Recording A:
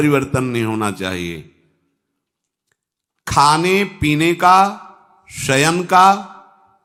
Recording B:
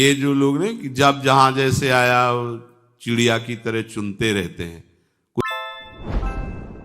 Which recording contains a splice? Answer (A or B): B